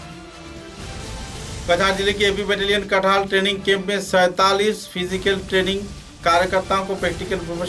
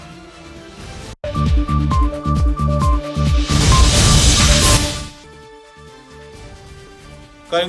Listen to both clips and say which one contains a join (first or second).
first